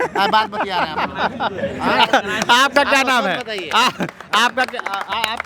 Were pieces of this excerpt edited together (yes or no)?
no